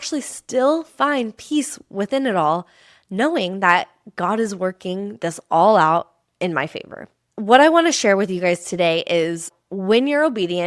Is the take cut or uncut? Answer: uncut